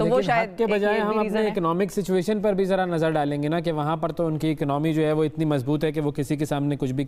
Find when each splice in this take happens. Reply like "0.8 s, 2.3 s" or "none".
none

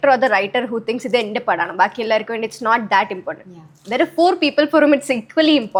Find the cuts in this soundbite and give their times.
none

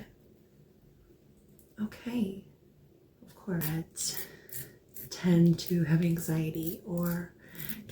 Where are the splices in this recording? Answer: 3.6 s

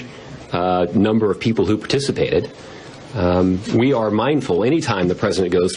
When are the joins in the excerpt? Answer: 2.5 s

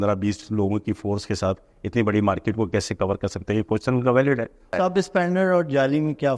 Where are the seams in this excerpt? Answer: 4.7 s

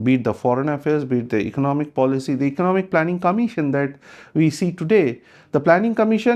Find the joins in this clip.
none

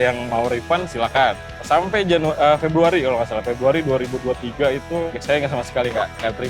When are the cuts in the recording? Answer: 1.5 s, 5.2 s

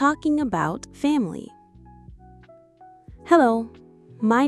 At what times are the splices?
none

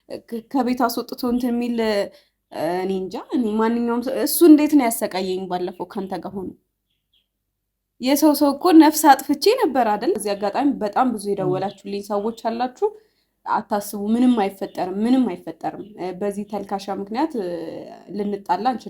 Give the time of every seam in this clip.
10.2 s

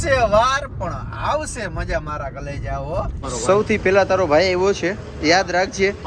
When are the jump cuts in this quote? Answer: 3.2 s

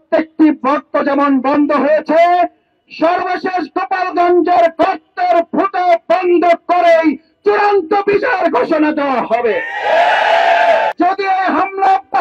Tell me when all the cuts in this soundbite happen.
10.9 s

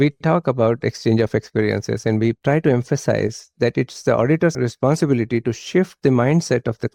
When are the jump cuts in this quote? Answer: none

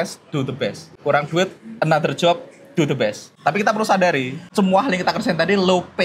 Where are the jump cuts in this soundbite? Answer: 0.9 s, 3.3 s, 4.4 s

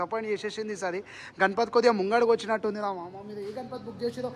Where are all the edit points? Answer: none

